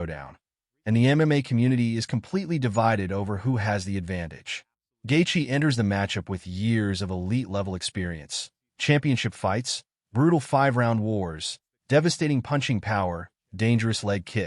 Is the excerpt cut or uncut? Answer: cut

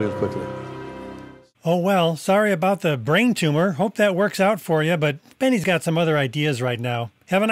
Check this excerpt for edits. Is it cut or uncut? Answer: uncut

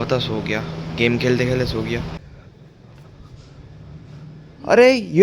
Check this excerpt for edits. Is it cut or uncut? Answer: cut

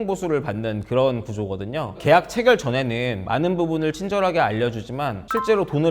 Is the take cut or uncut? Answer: cut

